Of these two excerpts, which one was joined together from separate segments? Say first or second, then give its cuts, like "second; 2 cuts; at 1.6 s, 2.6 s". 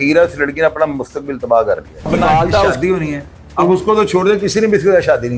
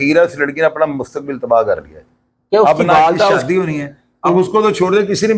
first; 1 cut; at 2.1 s